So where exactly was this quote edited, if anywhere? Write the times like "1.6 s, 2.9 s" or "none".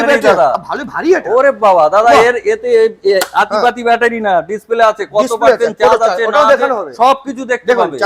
none